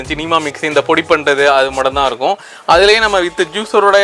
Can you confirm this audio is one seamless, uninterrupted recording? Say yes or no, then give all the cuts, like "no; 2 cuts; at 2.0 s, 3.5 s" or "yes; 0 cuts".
yes; 0 cuts